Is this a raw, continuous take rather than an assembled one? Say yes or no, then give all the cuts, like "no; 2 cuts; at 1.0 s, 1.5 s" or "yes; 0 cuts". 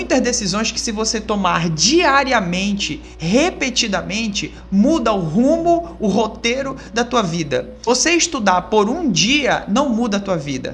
no; 1 cut; at 7.9 s